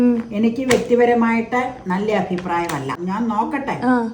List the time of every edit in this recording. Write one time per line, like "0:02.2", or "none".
0:02.9